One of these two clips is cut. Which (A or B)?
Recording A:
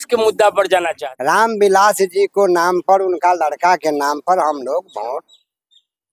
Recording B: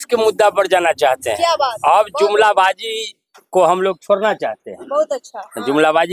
A